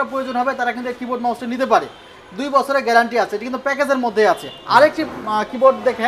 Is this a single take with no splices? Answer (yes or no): yes